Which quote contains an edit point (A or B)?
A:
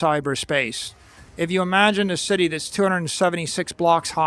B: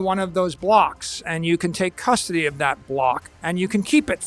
B